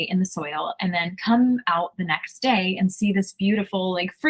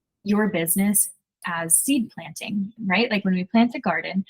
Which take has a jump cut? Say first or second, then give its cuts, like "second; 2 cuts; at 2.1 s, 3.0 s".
second; 2 cuts; at 1.2 s, 2.7 s